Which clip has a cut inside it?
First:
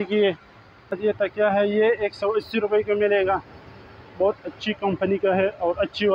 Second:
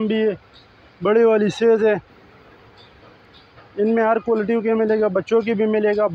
first; 1 cut; at 0.9 s

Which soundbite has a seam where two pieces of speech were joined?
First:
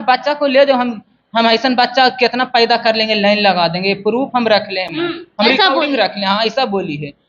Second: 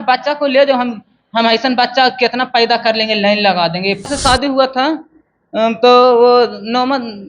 second; 1 cut; at 4.1 s

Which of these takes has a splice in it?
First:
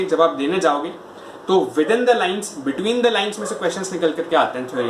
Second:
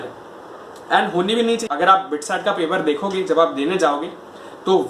second; 1 cut; at 1.6 s

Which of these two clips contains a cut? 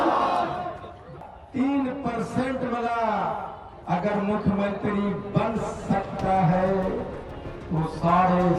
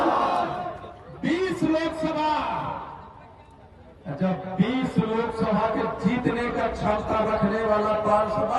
first; 1 cut; at 1.1 s

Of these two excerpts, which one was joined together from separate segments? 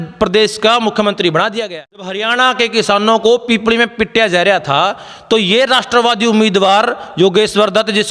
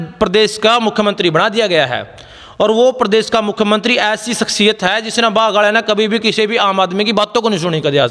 first; 1 cut; at 2.2 s

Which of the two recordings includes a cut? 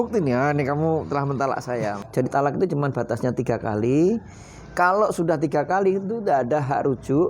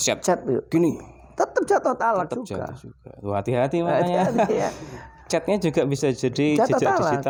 first; 1 cut; at 2.0 s

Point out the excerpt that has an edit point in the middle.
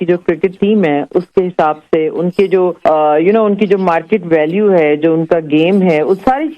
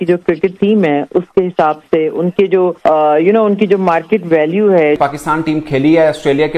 second; 1 cut; at 5.0 s

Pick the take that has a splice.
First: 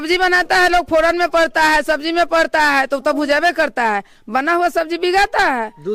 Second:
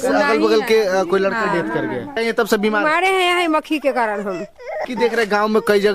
second; 2 cuts; at 2.1 s, 4.8 s

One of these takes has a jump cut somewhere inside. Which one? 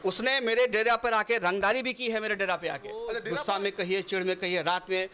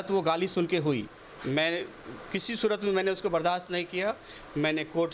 first; 1 cut; at 3.2 s

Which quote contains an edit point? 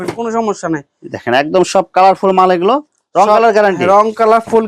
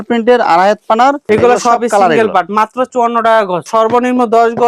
second; 2 cuts; at 1.2 s, 3.7 s

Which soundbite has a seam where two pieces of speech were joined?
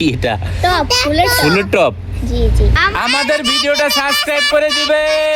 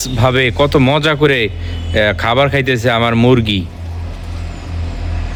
first; 1 cut; at 2.7 s

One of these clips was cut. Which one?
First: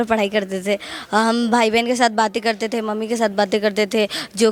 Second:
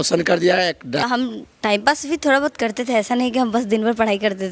second; 1 cut; at 1.1 s

